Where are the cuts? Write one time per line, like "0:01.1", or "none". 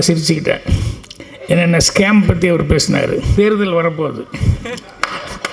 0:03.3

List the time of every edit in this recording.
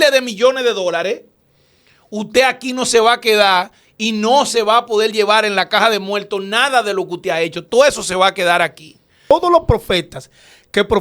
0:09.3

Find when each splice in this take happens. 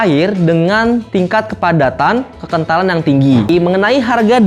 0:03.5

